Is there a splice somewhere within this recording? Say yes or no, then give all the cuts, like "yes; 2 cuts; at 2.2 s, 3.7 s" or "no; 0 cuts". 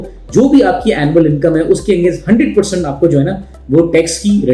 no; 0 cuts